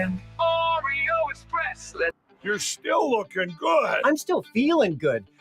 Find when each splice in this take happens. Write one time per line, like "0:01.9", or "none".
0:02.2